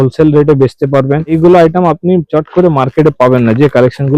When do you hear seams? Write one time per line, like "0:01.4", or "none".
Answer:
0:01.4